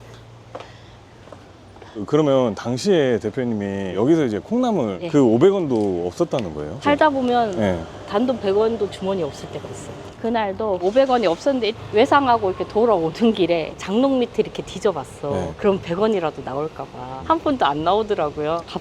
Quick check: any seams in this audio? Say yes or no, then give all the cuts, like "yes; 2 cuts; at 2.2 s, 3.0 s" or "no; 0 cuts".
yes; 4 cuts; at 1.9 s, 10.1 s, 11.7 s, 17.1 s